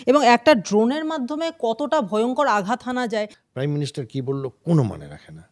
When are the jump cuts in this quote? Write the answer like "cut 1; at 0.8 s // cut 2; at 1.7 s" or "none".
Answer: cut 1; at 3.4 s